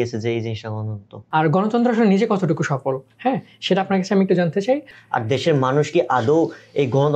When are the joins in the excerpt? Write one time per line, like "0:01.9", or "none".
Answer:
0:01.1
0:05.0